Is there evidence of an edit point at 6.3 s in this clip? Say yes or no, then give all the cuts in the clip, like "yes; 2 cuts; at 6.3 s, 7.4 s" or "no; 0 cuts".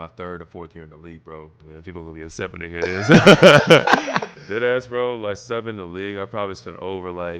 no; 2 cuts; at 1.6 s, 4.4 s